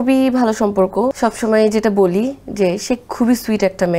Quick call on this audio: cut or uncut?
cut